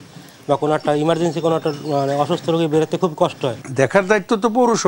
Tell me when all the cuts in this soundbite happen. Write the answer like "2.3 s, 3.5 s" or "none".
3.6 s